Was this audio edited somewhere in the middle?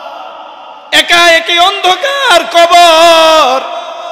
no; 0 cuts

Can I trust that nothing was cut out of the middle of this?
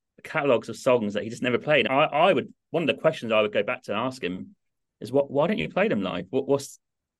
yes; 0 cuts

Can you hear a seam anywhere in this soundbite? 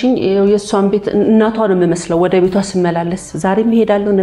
no; 0 cuts

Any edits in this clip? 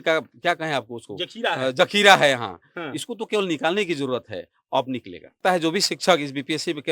yes; 1 cut; at 5.4 s

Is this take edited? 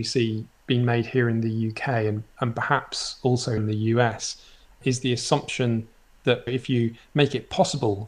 yes; 2 cuts; at 3.6 s, 6.5 s

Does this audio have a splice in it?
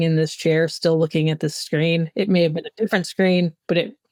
no; 0 cuts

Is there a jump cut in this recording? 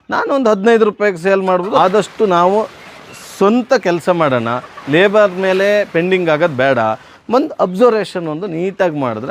yes; 2 cuts; at 1.8 s, 7.1 s

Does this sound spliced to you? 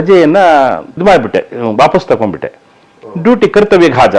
yes; 1 cut; at 1.0 s

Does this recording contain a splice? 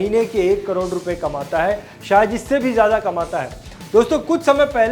no; 0 cuts

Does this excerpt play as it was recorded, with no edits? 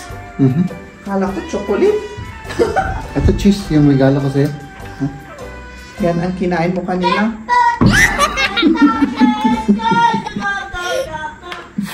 yes; 0 cuts

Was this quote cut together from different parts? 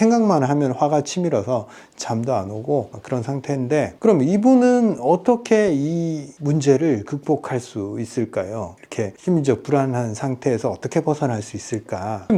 no; 0 cuts

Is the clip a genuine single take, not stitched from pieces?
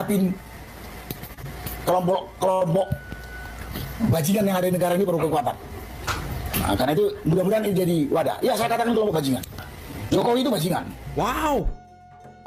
yes; 0 cuts

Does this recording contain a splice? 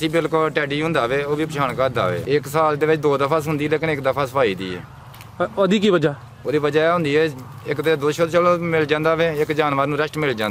yes; 1 cut; at 2.2 s

